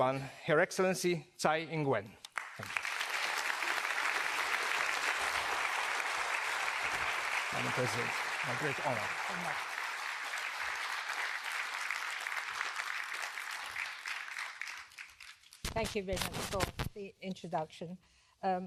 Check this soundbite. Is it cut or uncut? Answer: uncut